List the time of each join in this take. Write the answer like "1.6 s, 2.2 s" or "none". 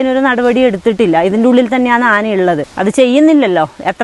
2.7 s